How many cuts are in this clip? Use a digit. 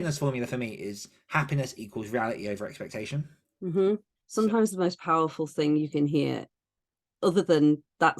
1